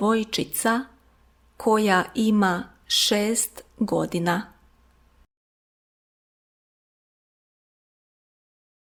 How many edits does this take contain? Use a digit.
0